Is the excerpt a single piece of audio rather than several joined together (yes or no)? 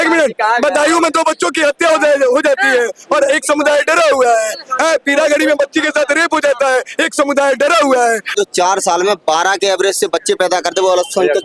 no